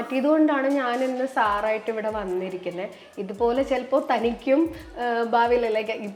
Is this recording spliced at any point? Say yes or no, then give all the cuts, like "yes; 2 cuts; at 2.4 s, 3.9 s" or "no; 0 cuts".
no; 0 cuts